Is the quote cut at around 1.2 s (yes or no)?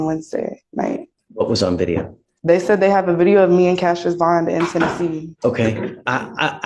yes